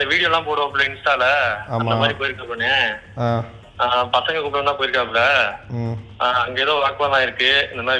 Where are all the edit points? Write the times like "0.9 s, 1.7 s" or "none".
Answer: none